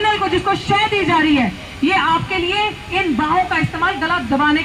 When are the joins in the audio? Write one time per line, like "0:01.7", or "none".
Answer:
none